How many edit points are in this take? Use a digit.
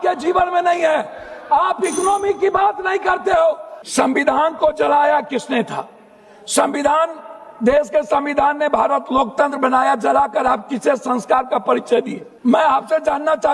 2